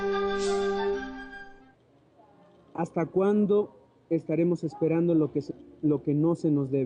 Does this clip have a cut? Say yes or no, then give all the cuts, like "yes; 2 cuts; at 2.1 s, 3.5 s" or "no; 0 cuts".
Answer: no; 0 cuts